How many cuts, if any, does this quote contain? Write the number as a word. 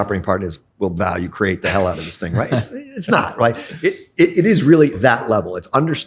zero